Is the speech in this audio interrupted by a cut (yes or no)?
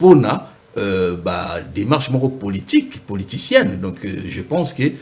no